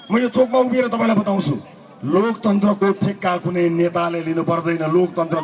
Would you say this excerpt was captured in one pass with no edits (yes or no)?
yes